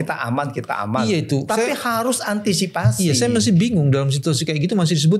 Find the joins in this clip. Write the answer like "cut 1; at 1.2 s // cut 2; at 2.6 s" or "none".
none